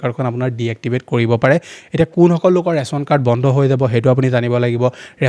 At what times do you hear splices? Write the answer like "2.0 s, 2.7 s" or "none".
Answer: none